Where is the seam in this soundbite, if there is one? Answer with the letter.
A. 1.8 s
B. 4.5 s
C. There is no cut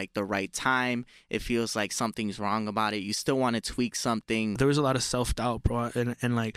B